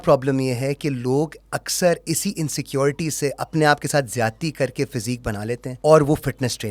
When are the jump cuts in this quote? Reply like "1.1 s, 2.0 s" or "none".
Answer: 5.7 s